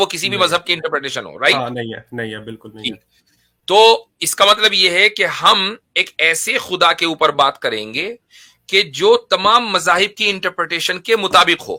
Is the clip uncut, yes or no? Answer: yes